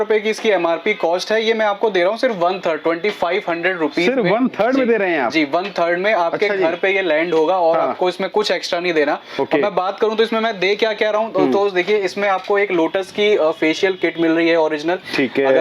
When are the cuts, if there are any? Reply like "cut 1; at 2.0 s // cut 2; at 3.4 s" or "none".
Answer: none